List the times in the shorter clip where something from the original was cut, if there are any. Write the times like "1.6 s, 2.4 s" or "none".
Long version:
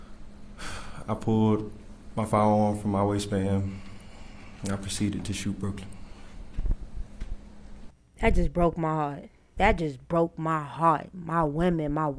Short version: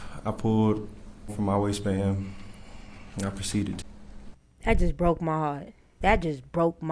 1.3 s, 3.8 s

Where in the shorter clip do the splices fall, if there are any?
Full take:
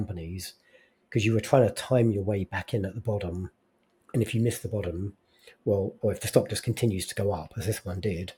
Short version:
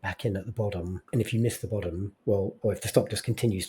1.0 s, 2.1 s

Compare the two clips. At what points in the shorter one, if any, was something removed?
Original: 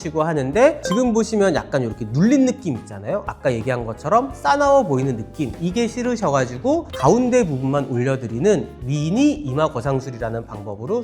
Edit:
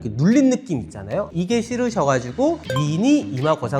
1.3 s, 2.6 s

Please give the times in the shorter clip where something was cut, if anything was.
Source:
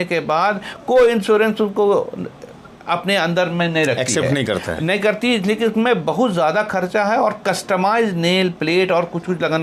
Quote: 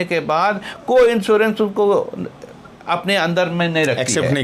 none

